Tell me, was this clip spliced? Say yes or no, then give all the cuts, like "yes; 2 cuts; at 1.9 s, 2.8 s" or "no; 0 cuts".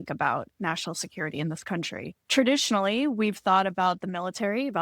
yes; 1 cut; at 2.2 s